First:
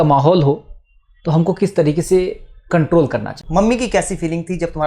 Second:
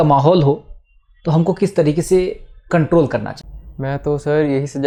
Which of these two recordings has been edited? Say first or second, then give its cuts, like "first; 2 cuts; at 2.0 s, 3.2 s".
first; 1 cut; at 3.4 s